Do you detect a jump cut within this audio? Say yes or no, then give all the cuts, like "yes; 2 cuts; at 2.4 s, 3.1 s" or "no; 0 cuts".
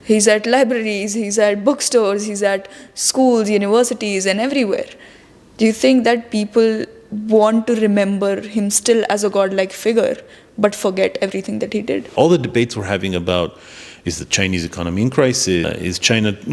yes; 2 cuts; at 12.1 s, 15.7 s